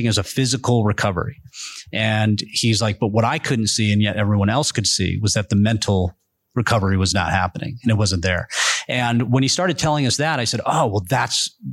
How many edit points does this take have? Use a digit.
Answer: 0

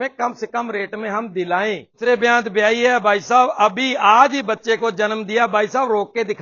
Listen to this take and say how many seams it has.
1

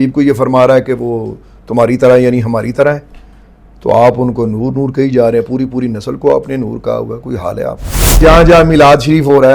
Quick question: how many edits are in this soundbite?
1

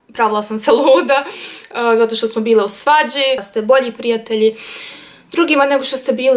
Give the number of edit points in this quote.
1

